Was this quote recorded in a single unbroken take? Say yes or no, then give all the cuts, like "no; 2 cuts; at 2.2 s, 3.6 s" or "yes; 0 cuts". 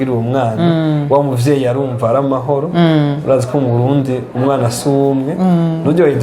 yes; 0 cuts